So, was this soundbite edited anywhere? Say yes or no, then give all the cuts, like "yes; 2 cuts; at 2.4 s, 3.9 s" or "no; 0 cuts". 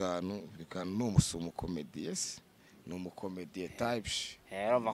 no; 0 cuts